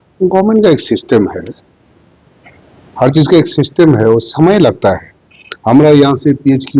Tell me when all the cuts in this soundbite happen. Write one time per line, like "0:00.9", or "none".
none